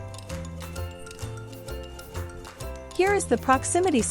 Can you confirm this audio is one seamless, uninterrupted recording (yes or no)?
no